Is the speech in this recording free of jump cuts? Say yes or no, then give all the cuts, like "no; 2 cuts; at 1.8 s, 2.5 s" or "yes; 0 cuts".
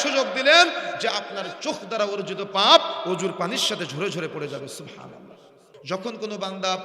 no; 1 cut; at 5.7 s